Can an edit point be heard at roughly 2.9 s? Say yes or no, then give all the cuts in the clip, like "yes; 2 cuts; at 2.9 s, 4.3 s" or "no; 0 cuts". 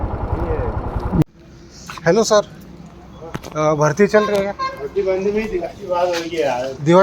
no; 1 cut; at 1.2 s